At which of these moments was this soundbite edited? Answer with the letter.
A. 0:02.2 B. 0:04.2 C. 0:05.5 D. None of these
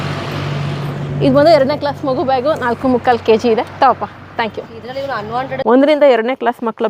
C